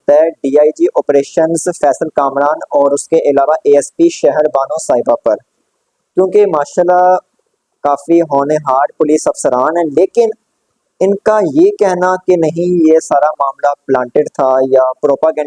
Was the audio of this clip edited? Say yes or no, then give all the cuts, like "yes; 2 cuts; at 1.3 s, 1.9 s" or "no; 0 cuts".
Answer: no; 0 cuts